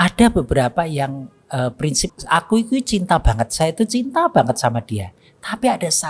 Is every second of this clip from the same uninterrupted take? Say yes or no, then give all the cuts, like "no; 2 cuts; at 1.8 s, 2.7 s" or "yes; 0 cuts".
no; 1 cut; at 2.1 s